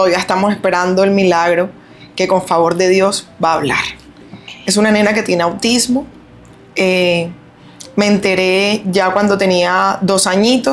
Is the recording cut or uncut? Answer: uncut